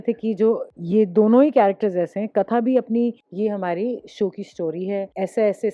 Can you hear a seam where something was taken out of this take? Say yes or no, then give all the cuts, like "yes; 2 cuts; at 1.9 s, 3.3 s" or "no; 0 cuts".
yes; 1 cut; at 3.2 s